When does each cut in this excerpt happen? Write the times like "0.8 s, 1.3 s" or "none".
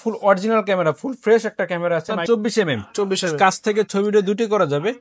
2.1 s